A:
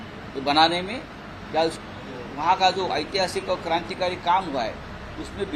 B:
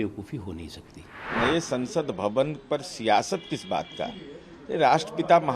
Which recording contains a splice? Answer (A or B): B